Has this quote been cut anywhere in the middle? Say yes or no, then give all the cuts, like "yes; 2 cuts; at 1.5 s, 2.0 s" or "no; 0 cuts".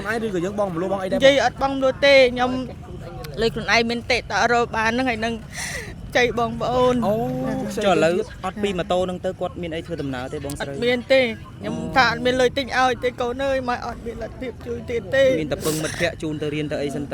no; 0 cuts